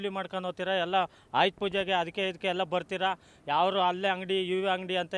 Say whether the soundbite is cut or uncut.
uncut